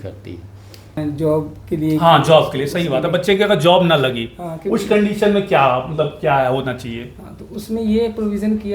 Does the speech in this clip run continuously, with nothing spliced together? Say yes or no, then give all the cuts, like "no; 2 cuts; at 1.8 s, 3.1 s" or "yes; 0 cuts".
no; 1 cut; at 1.0 s